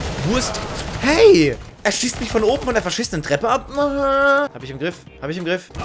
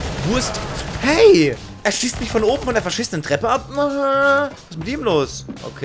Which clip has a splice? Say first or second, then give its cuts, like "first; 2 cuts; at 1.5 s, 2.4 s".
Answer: first; 1 cut; at 4.6 s